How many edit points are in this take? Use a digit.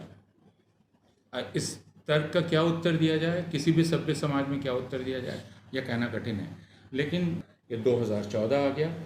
1